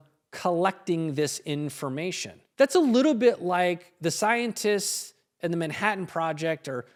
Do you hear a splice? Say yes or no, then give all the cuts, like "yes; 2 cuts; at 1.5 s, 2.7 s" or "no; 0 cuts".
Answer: no; 0 cuts